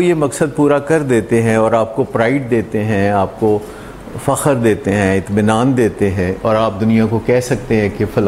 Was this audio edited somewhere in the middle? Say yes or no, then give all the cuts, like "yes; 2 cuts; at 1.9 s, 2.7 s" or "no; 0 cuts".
no; 0 cuts